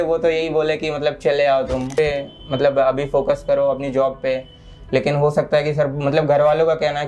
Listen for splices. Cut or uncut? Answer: cut